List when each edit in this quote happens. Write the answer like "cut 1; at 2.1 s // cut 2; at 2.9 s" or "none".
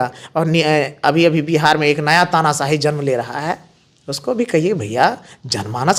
none